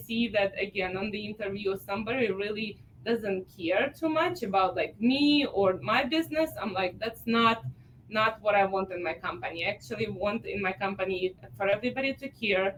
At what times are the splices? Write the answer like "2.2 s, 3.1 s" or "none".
none

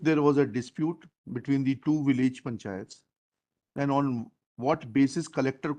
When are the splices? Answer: none

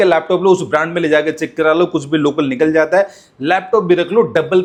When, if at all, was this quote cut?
none

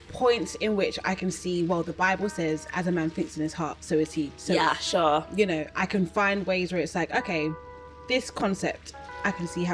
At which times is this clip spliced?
none

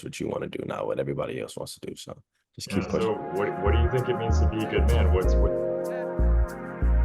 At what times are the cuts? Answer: 3.0 s

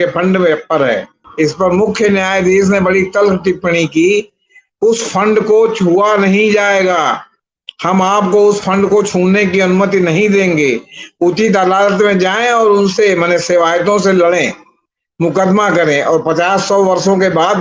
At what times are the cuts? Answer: 1.2 s

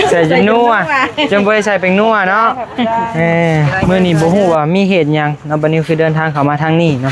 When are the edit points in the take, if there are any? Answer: 3.8 s

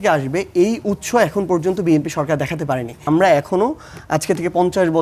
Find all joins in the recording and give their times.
3.0 s

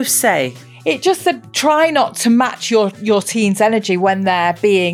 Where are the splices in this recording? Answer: none

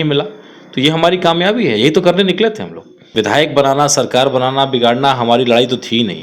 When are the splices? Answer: 3.1 s

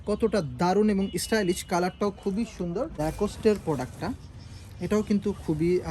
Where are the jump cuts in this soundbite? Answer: 3.0 s

